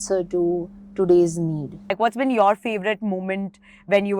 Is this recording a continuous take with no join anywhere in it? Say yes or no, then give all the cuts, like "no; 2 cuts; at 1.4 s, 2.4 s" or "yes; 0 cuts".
no; 1 cut; at 1.9 s